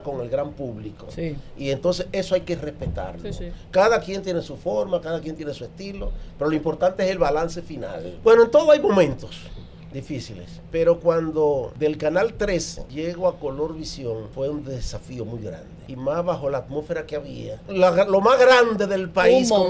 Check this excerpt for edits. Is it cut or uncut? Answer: cut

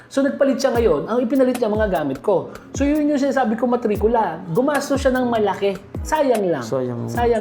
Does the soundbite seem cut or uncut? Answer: cut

